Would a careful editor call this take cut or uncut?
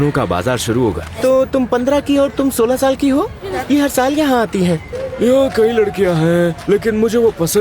cut